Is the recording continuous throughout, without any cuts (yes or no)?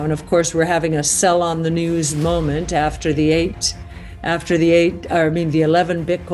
yes